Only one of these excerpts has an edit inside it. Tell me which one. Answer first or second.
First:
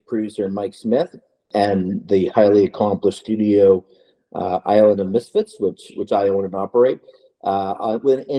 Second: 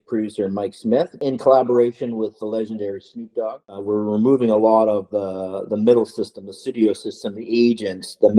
second